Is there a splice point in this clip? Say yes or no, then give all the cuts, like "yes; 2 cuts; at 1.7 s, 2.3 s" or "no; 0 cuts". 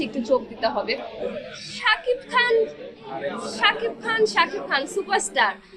yes; 1 cut; at 1.0 s